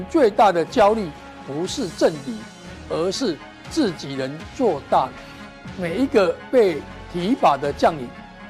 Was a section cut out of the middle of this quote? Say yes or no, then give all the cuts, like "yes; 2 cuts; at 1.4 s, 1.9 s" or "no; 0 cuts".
no; 0 cuts